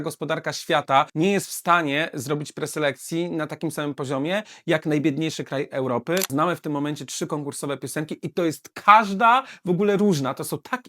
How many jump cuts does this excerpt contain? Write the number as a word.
two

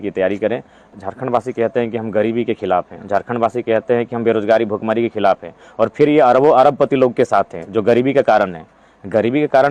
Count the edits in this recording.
one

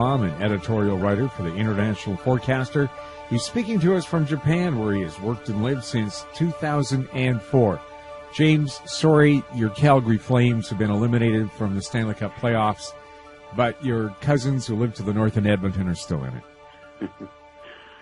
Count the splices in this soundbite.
one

